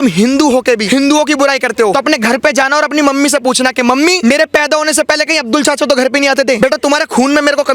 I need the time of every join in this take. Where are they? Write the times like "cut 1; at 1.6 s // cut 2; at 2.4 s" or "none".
cut 1; at 0.8 s // cut 2; at 1.9 s // cut 3; at 4.2 s // cut 4; at 6.6 s